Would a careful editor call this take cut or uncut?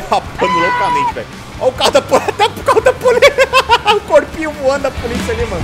uncut